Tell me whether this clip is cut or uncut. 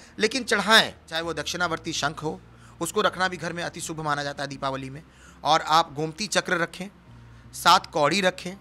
cut